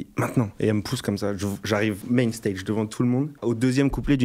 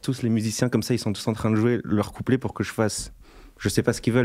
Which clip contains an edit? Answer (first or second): first